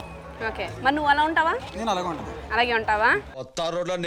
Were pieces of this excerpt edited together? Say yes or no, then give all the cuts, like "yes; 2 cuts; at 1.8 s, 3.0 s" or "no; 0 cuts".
no; 0 cuts